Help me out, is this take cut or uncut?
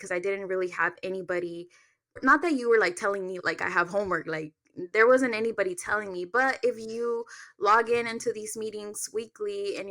cut